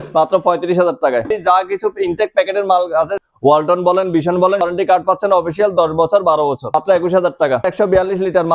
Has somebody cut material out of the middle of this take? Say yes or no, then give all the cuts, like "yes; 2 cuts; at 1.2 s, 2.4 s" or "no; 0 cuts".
yes; 5 cuts; at 1.3 s, 3.2 s, 4.6 s, 6.7 s, 7.7 s